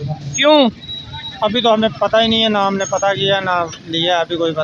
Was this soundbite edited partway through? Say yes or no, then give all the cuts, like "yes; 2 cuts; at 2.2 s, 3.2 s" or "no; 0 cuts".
no; 0 cuts